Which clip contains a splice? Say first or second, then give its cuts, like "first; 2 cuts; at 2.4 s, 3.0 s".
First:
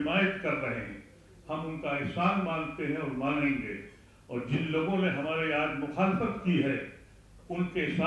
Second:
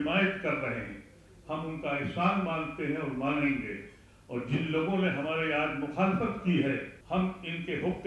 second; 1 cut; at 6.9 s